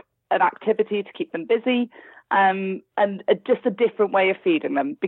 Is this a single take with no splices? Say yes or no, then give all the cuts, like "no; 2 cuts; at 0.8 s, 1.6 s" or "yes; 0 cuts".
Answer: yes; 0 cuts